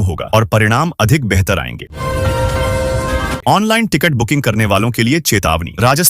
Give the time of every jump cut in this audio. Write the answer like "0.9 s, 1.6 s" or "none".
1.9 s, 3.4 s